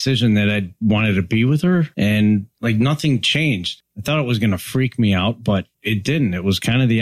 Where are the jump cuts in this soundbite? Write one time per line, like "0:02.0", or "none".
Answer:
0:01.9
0:02.5
0:03.7
0:05.8

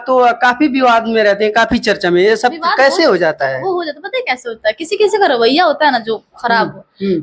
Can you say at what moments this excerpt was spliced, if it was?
none

